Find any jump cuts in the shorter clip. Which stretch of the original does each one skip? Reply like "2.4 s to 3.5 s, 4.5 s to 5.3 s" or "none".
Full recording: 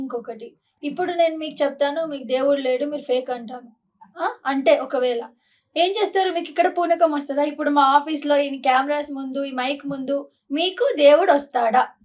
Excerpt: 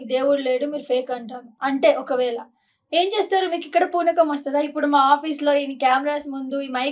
3.7 s to 4.4 s